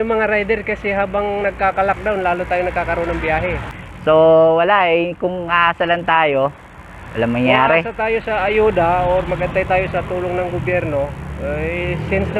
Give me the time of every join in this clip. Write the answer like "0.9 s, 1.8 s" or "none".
3.6 s